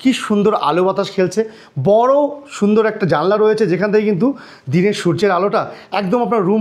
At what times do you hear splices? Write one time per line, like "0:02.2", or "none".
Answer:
none